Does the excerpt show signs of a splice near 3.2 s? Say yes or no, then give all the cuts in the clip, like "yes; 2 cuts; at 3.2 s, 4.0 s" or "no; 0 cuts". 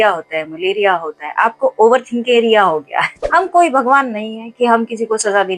yes; 1 cut; at 3.2 s